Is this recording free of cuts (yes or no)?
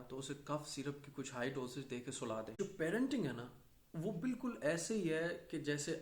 no